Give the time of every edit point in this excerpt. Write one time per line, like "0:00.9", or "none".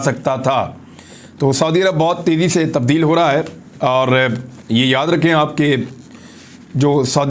none

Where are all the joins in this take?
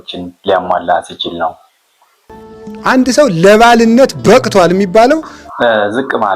0:05.4

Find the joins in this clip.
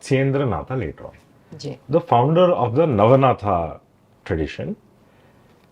none

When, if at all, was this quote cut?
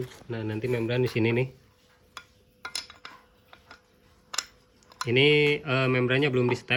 none

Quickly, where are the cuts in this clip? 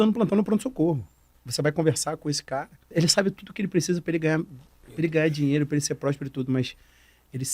0:01.4
0:02.8

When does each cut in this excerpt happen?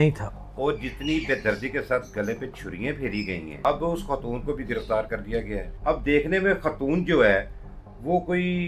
0:03.6
0:05.7

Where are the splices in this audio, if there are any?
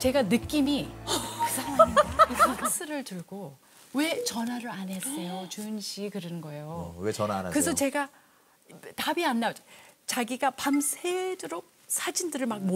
0:02.6

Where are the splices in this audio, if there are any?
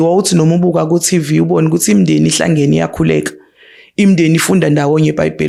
none

